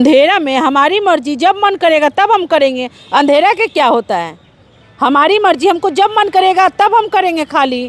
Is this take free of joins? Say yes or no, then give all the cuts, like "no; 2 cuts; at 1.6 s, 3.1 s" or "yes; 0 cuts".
yes; 0 cuts